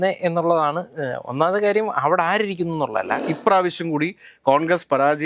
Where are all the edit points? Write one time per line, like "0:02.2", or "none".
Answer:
0:03.2